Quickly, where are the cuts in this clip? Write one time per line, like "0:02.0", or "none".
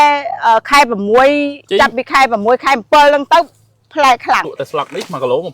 0:04.4